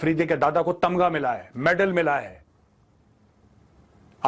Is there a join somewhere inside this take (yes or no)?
no